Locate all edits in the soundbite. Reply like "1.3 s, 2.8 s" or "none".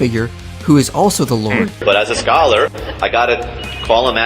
1.8 s